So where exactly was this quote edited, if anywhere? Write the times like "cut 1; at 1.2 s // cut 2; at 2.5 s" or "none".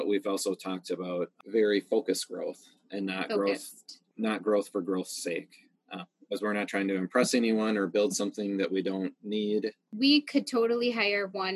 cut 1; at 9.9 s